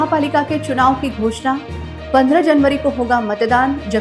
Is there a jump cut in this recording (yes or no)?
no